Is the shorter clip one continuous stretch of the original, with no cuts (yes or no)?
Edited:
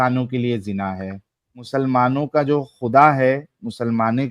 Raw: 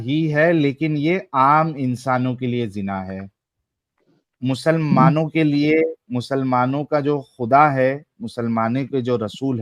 no